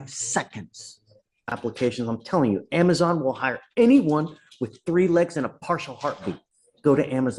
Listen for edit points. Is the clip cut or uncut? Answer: cut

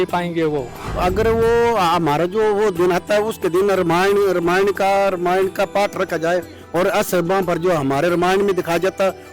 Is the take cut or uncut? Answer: cut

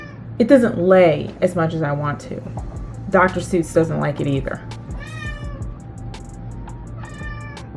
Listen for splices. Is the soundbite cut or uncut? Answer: uncut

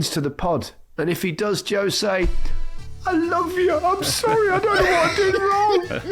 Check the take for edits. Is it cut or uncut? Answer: uncut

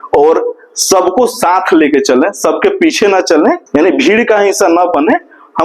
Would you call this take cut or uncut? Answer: cut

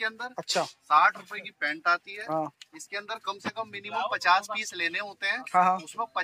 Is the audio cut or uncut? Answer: uncut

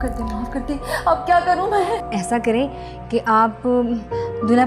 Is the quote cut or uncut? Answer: uncut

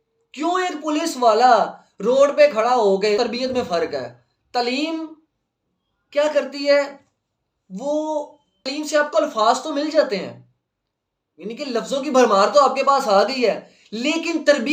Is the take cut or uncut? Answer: cut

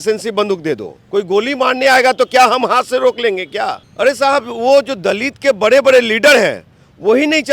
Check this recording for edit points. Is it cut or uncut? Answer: cut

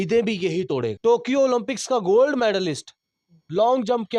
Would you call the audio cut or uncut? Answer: cut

